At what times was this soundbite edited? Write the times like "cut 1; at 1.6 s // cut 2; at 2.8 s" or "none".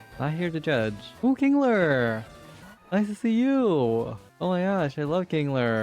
cut 1; at 1.1 s // cut 2; at 4.2 s